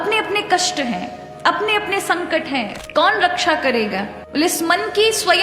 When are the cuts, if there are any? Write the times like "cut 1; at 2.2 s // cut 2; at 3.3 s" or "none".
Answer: cut 1; at 2.8 s